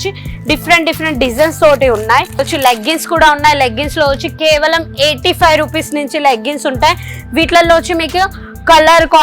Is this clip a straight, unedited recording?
no; 1 cut; at 2.4 s

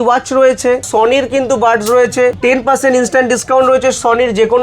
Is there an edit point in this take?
yes; 2 cuts; at 0.9 s, 2.4 s

